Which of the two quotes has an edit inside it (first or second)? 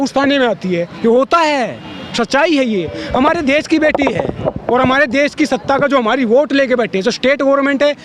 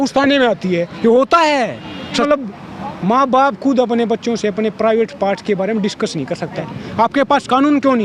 second